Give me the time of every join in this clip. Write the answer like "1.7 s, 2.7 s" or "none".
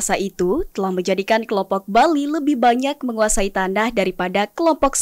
none

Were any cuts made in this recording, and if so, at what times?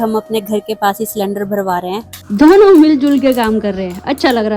2.2 s

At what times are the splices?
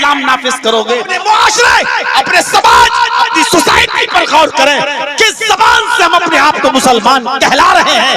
1.1 s

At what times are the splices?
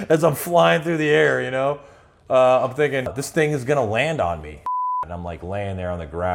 3.1 s, 4.7 s

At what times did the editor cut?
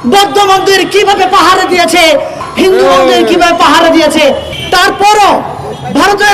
2.4 s, 4.5 s

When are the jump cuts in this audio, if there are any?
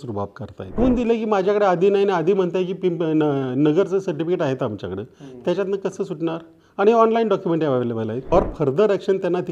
0.8 s, 8.3 s

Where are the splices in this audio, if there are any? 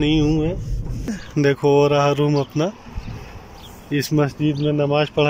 1.2 s

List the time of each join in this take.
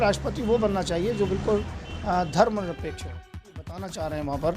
3.6 s

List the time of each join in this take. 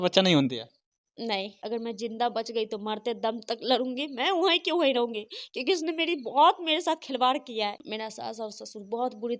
1.2 s, 7.8 s

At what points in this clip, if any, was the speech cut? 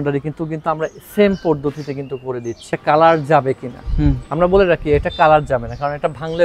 2.8 s

